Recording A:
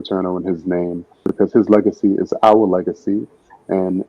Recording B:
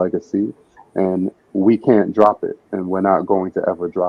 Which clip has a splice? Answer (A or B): A